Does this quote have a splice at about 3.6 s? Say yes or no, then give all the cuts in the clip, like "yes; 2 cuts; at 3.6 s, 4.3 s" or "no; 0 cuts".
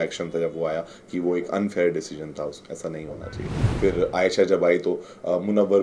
yes; 1 cut; at 3.6 s